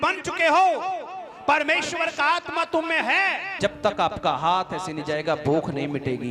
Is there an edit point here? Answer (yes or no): yes